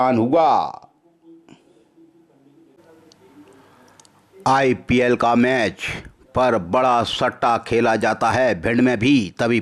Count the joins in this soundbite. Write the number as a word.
one